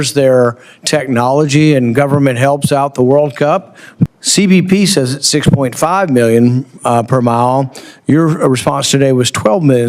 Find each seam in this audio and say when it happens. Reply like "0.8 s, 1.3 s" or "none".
4.1 s